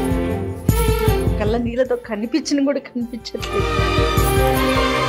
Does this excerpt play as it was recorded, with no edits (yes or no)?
yes